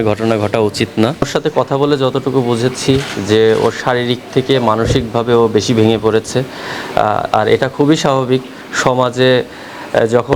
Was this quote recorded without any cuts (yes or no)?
no